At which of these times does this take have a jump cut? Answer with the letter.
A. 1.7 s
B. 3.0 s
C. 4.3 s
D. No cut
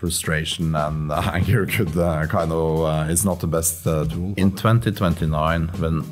C